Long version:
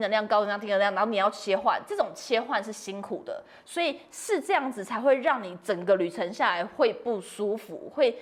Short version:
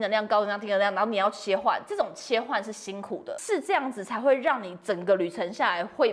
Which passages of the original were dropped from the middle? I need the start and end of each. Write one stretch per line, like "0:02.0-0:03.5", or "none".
0:03.4-0:04.2